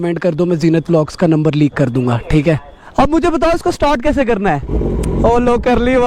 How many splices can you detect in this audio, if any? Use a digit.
1